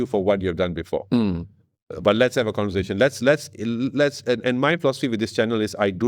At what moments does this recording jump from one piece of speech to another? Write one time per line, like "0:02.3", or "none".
none